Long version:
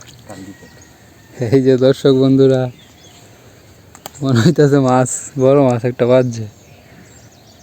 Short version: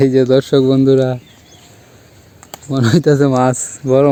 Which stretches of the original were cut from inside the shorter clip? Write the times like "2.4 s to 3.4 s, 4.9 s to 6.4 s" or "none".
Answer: none